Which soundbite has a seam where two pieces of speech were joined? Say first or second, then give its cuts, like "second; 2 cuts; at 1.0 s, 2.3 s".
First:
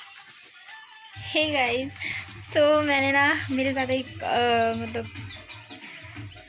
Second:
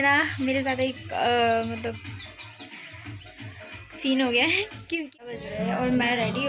second; 1 cut; at 5.3 s